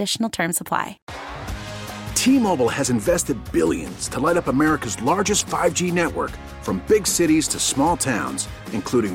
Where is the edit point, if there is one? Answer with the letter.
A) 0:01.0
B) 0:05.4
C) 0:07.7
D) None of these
A